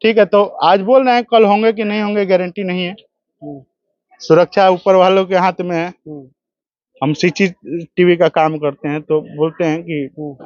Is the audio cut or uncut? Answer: uncut